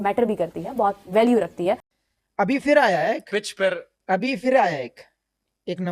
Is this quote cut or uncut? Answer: cut